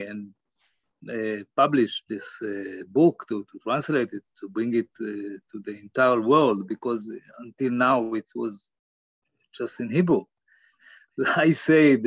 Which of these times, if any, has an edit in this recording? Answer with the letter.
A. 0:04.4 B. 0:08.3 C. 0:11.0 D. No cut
C